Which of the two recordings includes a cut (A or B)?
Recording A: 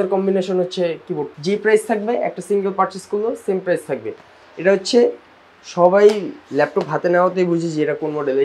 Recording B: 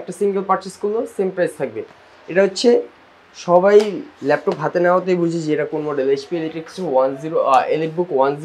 A